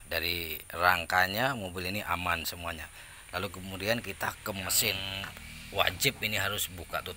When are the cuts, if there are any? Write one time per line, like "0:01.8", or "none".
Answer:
0:05.1